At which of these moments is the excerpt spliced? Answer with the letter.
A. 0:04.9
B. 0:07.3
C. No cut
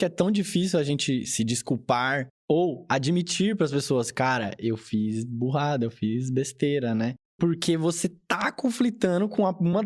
B